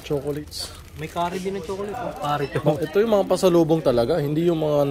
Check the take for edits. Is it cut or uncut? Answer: uncut